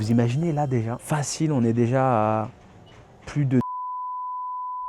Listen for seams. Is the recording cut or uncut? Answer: cut